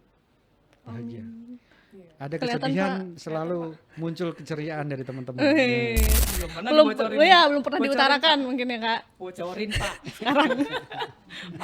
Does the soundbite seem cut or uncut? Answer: cut